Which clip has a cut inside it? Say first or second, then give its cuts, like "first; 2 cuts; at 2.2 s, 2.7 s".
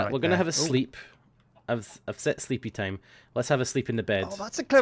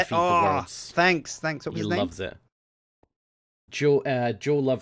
second; 1 cut; at 3.6 s